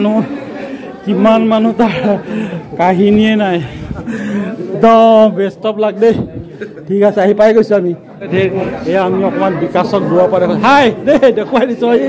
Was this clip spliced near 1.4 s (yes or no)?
no